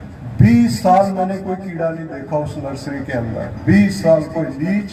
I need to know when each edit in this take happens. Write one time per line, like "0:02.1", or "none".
none

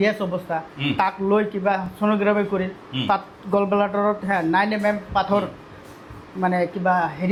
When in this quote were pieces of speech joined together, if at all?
none

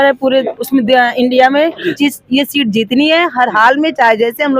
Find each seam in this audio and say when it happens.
0:02.0

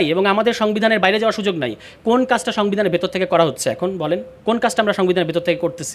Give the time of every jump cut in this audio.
none

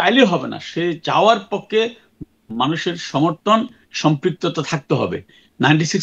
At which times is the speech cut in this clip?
none

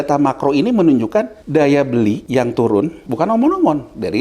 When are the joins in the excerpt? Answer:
0:01.4
0:02.2
0:03.0

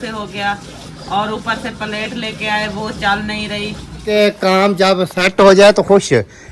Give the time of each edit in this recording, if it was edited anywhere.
0:04.0

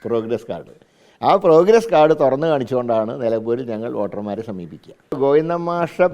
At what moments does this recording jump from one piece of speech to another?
0:05.2

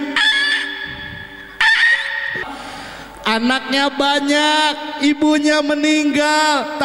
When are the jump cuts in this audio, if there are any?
0:02.4

